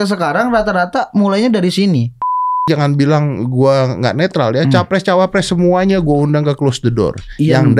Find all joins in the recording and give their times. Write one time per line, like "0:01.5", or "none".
0:02.7